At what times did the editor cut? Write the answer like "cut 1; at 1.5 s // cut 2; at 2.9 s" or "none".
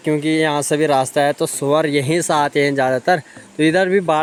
none